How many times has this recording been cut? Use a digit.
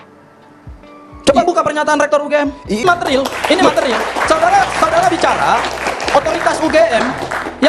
1